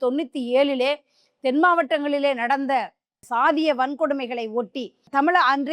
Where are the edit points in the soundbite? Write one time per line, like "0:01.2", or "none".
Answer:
none